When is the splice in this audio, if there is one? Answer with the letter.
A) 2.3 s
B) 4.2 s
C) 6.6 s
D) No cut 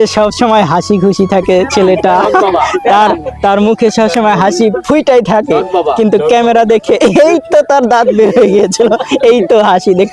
D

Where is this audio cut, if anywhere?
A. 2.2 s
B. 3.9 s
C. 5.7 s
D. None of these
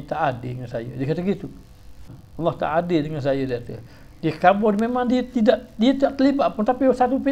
A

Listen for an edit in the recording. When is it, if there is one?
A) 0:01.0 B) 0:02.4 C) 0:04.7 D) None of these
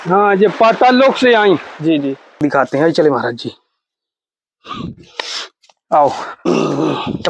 B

